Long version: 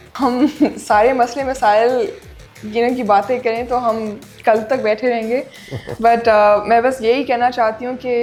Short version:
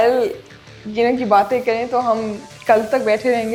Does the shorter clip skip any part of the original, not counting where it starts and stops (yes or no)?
no